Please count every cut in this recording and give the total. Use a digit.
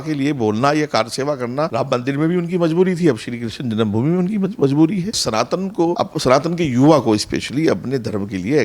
1